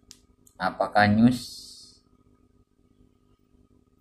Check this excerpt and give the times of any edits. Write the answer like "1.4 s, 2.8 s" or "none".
none